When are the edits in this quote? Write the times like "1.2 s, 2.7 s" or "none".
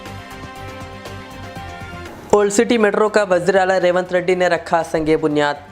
2.0 s